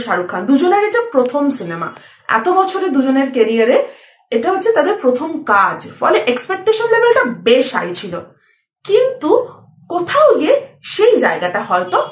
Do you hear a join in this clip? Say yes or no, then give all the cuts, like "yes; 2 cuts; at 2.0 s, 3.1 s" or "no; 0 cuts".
no; 0 cuts